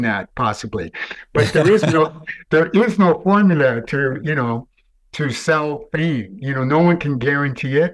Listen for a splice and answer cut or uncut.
uncut